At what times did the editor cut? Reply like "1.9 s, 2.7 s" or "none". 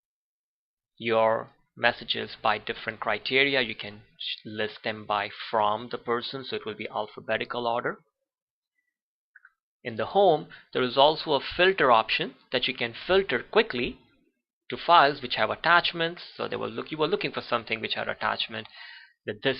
13.3 s